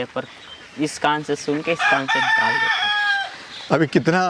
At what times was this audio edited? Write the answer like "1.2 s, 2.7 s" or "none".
none